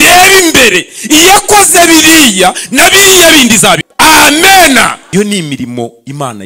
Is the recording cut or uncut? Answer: cut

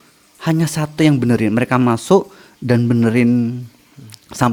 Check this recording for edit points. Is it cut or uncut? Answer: uncut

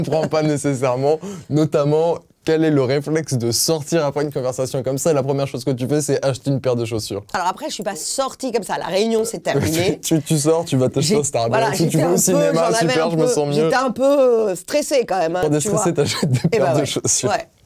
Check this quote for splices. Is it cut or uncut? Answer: uncut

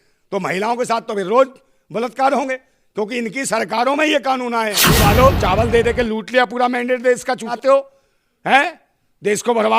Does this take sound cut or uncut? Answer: cut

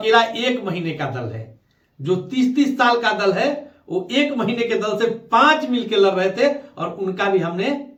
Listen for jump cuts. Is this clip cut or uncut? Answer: uncut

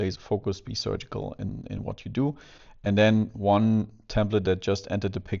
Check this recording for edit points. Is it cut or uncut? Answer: uncut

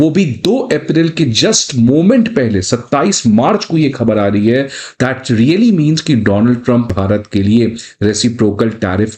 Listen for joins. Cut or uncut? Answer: uncut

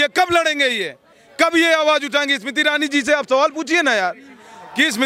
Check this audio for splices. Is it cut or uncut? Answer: uncut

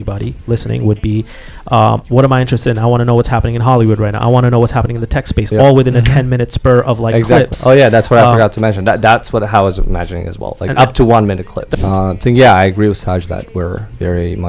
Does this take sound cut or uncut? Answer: cut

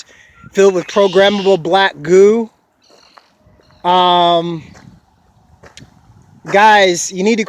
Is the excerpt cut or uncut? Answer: cut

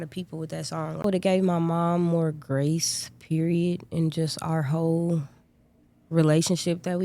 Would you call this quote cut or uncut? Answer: cut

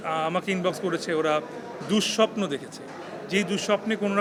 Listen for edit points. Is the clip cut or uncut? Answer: uncut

